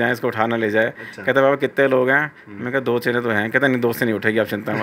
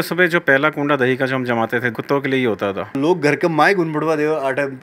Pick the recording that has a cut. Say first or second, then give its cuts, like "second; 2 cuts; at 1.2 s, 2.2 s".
second; 2 cuts; at 1.9 s, 3.0 s